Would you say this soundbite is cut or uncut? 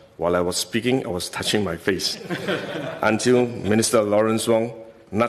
uncut